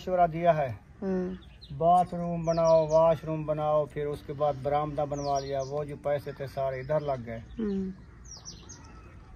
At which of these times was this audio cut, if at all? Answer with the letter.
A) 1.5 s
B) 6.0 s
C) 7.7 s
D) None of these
D